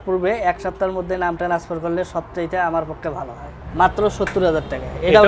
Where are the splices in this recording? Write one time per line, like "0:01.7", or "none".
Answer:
0:03.6